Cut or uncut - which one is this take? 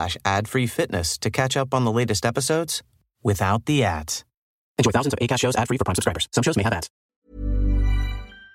cut